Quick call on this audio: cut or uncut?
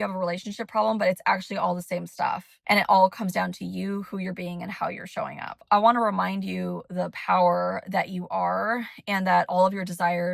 cut